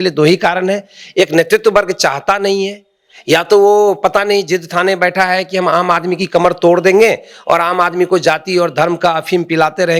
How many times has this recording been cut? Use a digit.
0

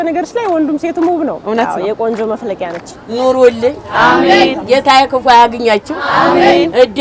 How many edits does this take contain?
2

